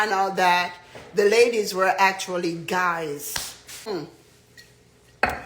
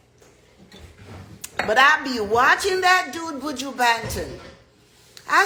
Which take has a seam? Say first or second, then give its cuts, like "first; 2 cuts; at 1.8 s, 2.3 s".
first; 1 cut; at 3.9 s